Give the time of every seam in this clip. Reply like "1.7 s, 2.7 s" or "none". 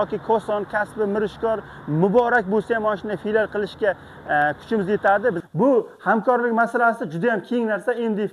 5.4 s